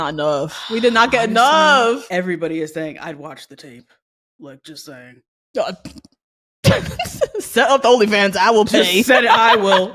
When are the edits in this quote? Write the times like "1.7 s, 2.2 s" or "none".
2.0 s